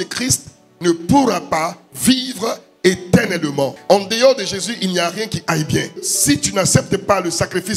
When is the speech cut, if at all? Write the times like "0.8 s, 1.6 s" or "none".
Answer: 3.8 s, 6.0 s